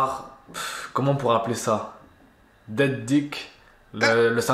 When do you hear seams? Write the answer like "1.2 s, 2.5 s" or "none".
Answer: none